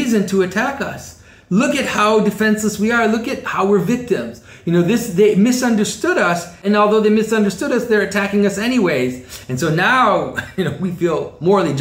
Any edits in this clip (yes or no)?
yes